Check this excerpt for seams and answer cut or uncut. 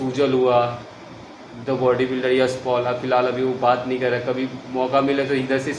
uncut